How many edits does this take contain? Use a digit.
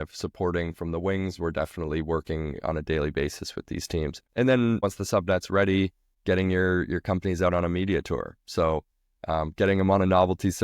3